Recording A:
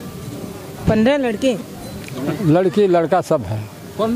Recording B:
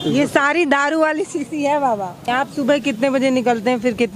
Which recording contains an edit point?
B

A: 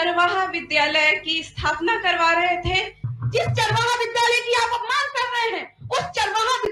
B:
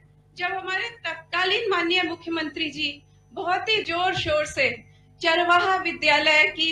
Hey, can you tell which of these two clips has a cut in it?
A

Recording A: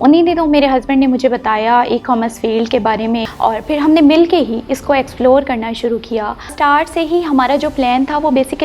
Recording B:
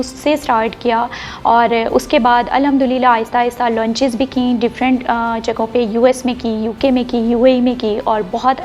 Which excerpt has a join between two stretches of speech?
A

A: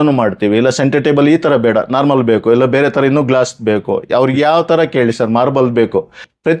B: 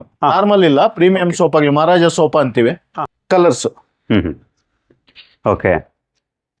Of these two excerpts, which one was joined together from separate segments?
B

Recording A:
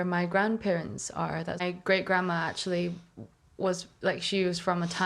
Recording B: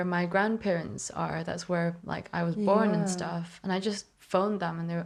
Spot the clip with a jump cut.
A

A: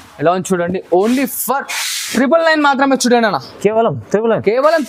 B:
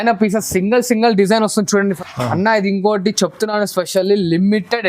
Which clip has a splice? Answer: B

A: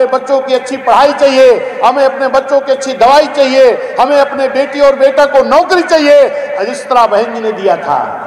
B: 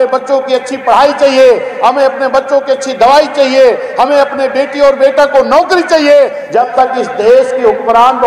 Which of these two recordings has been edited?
B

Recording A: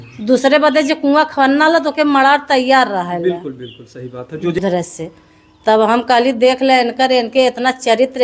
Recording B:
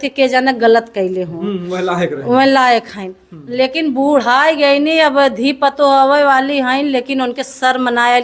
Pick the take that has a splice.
A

